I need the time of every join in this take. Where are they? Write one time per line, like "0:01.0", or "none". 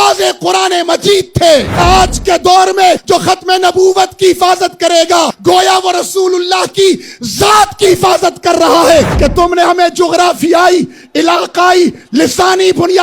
0:01.8
0:03.0
0:05.3
0:09.1